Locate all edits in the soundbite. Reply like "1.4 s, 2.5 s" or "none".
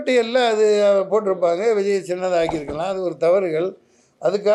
none